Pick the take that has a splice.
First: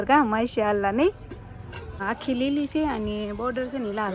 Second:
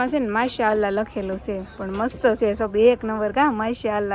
first; 1 cut; at 2.0 s

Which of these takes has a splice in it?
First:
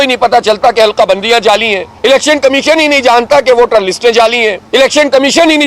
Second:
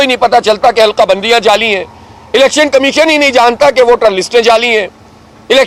first; 2 cuts; at 1.8 s, 4.6 s

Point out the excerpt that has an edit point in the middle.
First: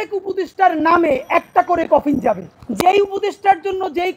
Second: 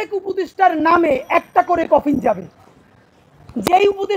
first; 1 cut; at 2.6 s

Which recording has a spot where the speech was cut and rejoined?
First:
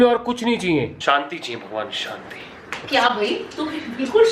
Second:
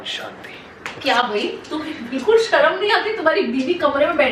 first; 1 cut; at 0.9 s

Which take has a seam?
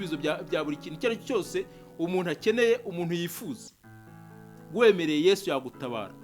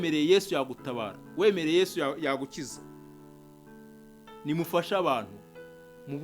second; 2 cuts; at 2.7 s, 4.4 s

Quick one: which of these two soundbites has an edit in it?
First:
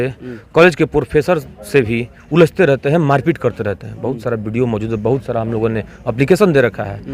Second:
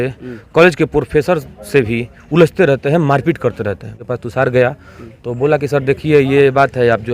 second; 1 cut; at 3.9 s

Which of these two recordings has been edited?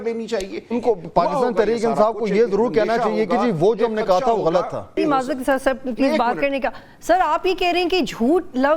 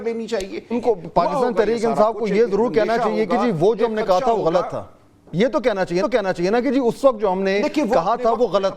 first; 1 cut; at 5.0 s

